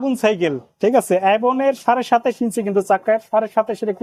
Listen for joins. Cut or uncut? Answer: uncut